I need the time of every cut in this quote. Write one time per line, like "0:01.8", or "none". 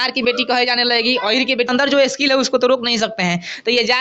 0:01.7